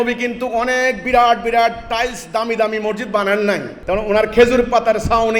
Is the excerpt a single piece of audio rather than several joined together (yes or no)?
no